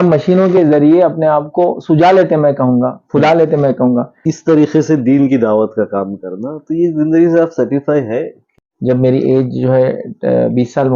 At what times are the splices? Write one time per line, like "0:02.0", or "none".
0:04.2
0:08.4